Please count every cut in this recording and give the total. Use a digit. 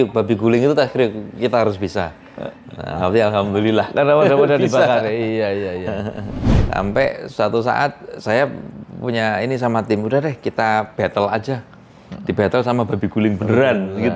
1